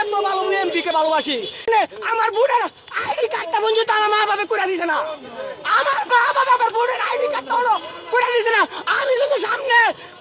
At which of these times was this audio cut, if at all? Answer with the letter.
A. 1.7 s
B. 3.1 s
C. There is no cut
A